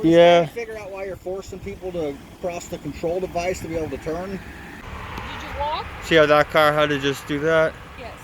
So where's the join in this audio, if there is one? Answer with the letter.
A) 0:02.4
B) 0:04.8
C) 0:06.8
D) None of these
B